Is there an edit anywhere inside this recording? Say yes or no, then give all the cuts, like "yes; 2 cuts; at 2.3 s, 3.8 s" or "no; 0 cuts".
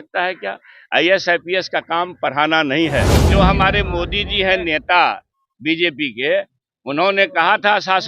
yes; 1 cut; at 3.2 s